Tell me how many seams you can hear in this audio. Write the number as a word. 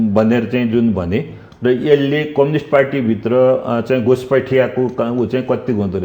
zero